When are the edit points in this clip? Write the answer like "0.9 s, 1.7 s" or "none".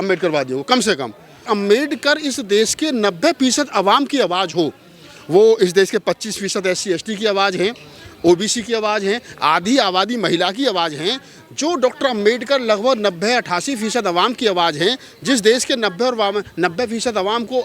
1.4 s